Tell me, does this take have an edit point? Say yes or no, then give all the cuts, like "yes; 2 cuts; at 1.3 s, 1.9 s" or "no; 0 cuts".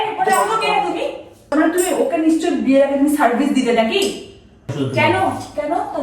yes; 2 cuts; at 1.5 s, 4.7 s